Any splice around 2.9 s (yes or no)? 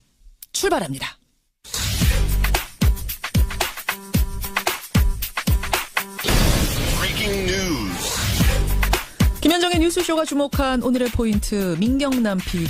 no